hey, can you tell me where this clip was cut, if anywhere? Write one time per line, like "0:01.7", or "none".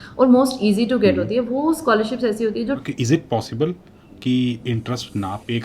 0:02.8